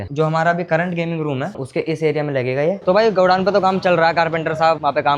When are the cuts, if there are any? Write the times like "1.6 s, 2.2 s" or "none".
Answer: 2.8 s